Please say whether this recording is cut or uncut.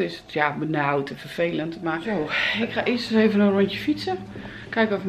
cut